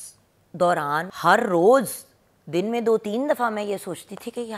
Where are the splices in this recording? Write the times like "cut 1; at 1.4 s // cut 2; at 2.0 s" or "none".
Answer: cut 1; at 1.1 s